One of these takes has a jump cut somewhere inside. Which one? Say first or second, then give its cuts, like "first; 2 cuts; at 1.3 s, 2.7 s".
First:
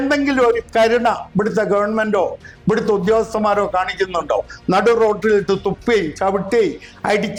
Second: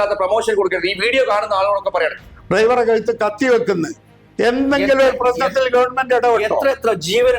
second; 1 cut; at 2.2 s